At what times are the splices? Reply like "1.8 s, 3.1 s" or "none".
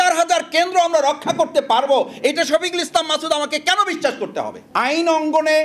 4.6 s